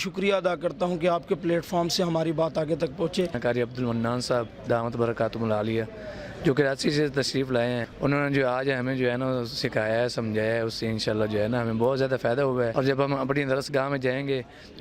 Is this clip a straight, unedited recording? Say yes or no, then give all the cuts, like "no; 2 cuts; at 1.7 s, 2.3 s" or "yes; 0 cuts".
no; 3 cuts; at 3.4 s, 7.9 s, 12.7 s